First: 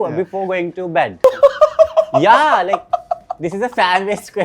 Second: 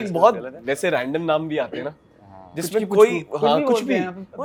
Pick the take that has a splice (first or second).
first